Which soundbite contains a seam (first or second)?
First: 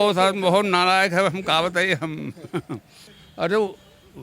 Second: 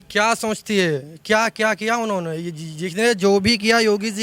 first